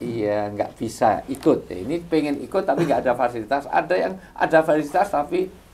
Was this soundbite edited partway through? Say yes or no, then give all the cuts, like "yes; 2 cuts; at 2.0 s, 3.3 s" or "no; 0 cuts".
no; 0 cuts